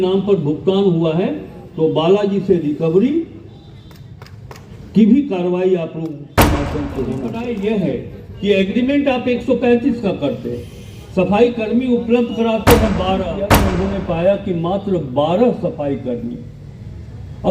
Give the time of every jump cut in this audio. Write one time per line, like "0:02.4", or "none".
0:07.3
0:13.6